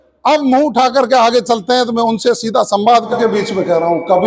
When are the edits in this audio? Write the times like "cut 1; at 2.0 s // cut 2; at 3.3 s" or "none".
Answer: cut 1; at 3.1 s